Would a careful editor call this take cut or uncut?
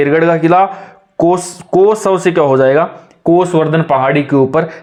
uncut